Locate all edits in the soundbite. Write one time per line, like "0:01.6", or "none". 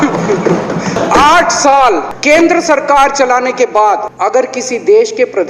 0:00.9
0:02.1
0:04.1